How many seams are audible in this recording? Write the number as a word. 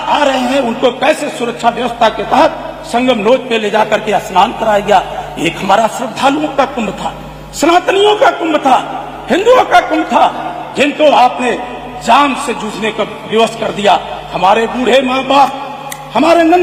zero